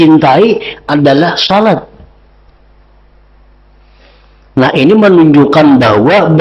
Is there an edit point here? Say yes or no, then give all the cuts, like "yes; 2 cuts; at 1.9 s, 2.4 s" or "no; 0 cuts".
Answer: no; 0 cuts